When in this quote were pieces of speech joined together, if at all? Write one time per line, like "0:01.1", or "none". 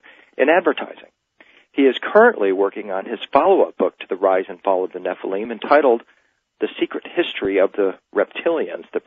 0:04.5